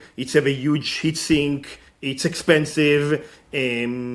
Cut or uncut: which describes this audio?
uncut